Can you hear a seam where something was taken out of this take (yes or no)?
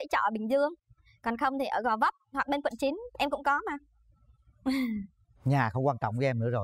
no